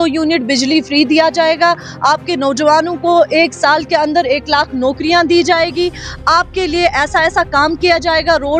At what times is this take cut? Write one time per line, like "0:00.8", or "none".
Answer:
none

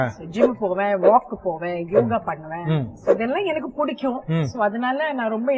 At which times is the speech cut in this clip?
none

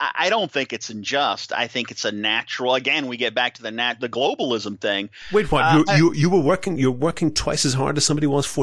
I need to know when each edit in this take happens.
none

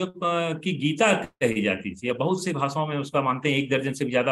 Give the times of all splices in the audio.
none

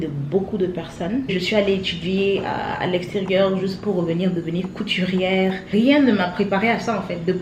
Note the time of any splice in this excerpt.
0:01.3
0:05.6

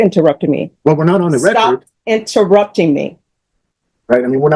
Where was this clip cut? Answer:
none

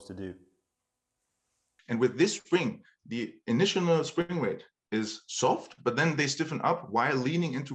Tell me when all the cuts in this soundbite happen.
0:01.7

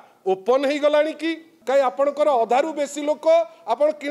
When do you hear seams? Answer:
0:01.5

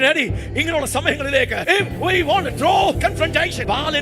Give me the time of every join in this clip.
0:01.6
0:03.2

